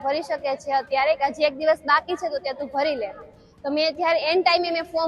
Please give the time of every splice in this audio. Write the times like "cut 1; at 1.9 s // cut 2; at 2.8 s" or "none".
none